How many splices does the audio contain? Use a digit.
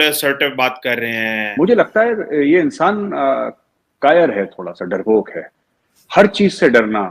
1